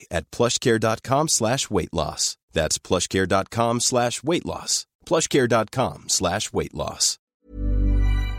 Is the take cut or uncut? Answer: cut